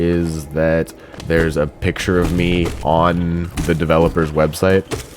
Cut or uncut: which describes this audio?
cut